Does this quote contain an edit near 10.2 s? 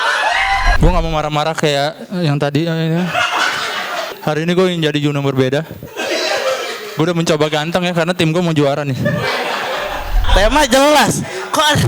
yes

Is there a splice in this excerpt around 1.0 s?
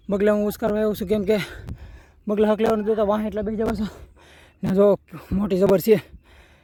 no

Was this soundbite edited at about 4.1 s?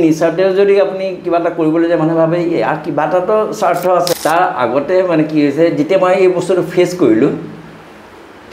yes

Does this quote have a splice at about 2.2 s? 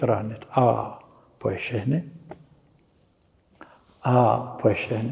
no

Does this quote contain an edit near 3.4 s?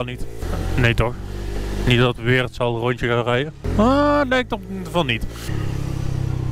no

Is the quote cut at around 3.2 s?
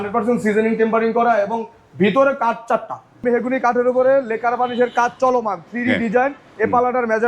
yes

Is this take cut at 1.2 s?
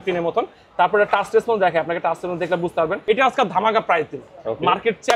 no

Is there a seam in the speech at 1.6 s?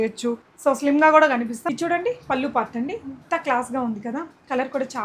yes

